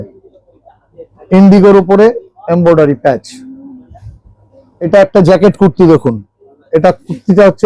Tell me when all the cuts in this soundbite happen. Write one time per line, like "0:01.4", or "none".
0:01.2
0:04.9

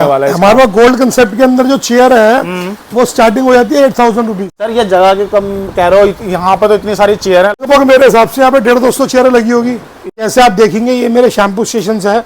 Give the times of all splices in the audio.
0:04.6
0:07.6
0:10.2

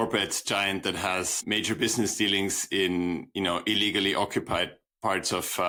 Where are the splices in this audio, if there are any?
none

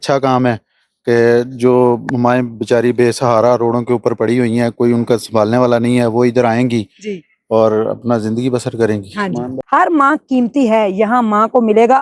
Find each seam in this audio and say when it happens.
0:09.5

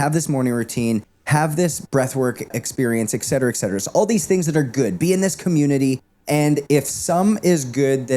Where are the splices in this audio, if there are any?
0:02.5
0:06.1

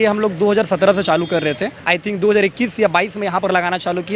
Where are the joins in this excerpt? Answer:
0:01.7

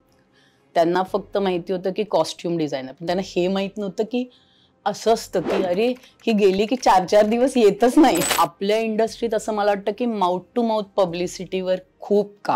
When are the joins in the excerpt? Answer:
0:08.2

